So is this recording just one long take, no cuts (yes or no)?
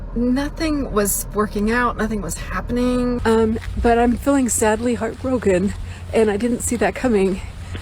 no